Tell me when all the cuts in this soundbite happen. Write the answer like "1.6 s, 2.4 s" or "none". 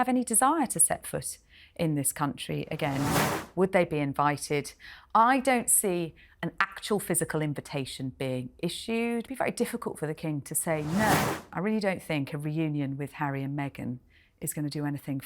3.2 s, 9.3 s, 11.5 s